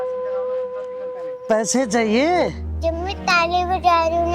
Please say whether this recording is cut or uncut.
cut